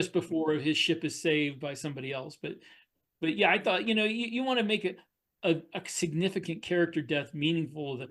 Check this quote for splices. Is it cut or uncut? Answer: uncut